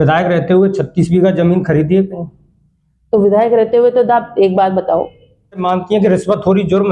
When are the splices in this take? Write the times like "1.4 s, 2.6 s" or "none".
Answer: 5.6 s